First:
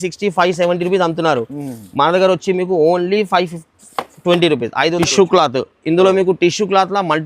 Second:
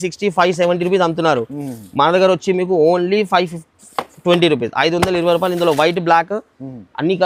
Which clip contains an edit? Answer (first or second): first